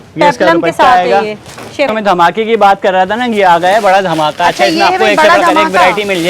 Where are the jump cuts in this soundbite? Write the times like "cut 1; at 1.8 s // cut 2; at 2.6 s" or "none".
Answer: cut 1; at 1.9 s